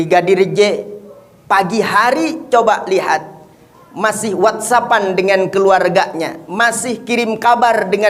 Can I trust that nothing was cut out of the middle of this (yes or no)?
yes